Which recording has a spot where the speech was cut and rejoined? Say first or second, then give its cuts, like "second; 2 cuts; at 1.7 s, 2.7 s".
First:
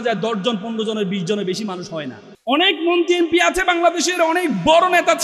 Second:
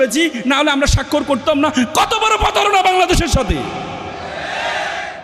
first; 1 cut; at 2.2 s